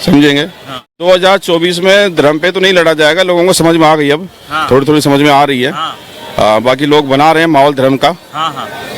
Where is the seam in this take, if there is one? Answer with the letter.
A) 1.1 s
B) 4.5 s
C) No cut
A